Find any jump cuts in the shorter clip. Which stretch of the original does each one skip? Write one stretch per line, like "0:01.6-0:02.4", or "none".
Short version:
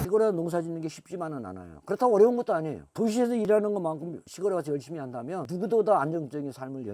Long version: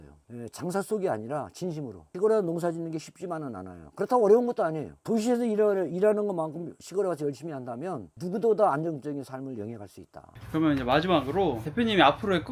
0:05.5-0:06.0
0:08.0-0:08.2